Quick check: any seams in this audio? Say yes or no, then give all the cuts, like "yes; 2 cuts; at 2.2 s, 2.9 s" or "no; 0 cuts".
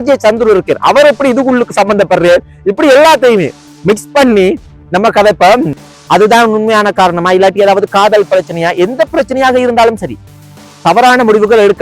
yes; 1 cut; at 5.8 s